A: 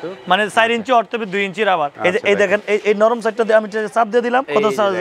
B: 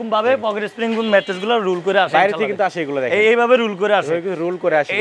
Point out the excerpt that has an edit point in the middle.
A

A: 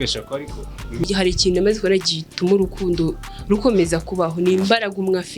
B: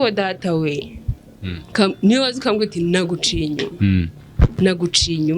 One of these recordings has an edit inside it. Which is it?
A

